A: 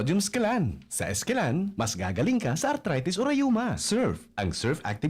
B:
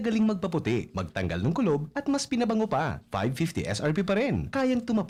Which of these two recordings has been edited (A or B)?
A